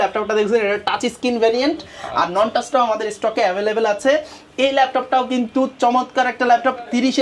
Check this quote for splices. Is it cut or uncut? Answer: uncut